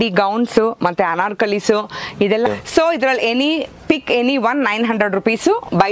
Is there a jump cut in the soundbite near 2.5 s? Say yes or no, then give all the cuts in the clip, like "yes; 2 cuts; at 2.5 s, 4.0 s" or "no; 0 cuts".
yes; 1 cut; at 2.5 s